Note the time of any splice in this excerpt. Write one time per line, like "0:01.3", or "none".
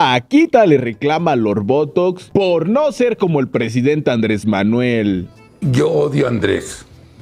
0:00.9